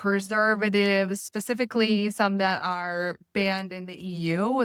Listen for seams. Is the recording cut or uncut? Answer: uncut